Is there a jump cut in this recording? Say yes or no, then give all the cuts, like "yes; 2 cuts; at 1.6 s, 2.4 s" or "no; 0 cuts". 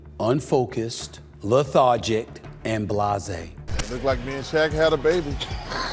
yes; 1 cut; at 3.6 s